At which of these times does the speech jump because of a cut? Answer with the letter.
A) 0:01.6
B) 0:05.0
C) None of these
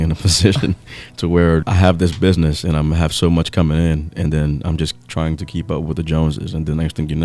A